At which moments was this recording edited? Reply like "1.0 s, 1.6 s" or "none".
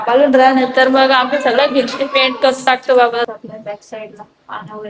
3.3 s